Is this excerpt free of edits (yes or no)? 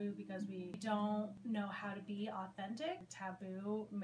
no